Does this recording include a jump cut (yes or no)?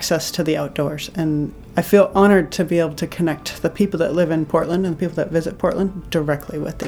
yes